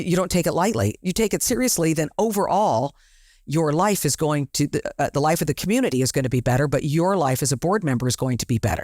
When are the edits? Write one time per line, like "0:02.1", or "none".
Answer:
0:01.0